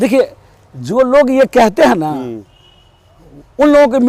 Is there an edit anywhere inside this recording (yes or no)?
no